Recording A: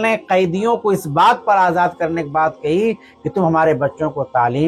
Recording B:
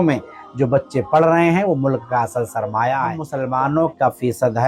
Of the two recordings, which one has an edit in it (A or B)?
B